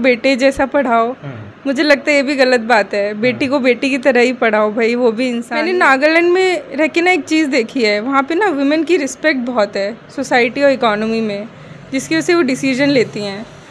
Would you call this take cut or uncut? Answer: cut